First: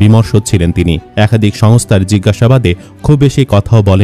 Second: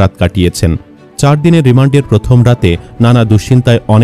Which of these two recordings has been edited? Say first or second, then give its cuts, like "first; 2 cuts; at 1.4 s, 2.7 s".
first; 1 cut; at 1.0 s